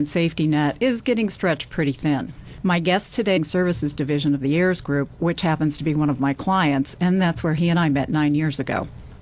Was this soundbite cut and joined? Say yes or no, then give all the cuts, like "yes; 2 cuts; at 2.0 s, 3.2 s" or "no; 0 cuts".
no; 0 cuts